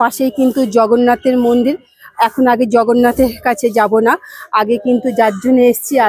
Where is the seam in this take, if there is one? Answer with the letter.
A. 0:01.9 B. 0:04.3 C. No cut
C